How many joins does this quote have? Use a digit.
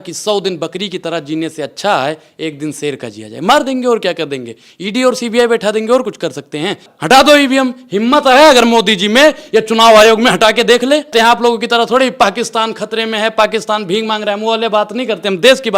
2